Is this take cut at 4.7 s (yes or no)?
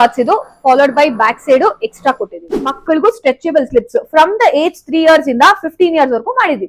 no